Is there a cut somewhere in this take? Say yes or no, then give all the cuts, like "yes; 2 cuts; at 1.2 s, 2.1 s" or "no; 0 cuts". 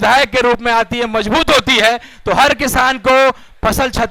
no; 0 cuts